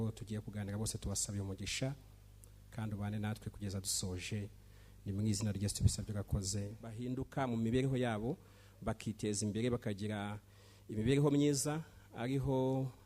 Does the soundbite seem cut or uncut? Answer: cut